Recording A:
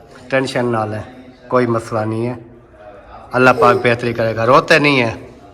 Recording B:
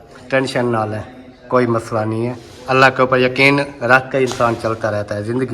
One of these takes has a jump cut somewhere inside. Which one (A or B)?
B